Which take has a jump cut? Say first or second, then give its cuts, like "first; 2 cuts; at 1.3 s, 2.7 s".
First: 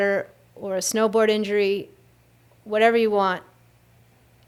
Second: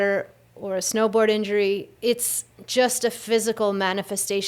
second; 1 cut; at 1.9 s